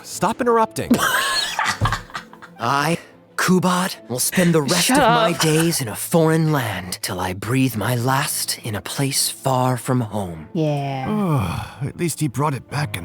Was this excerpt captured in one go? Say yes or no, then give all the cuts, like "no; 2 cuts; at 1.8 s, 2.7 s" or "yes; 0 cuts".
yes; 0 cuts